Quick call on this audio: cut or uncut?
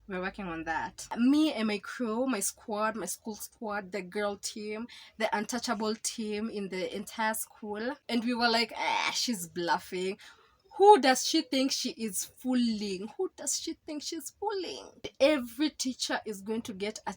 cut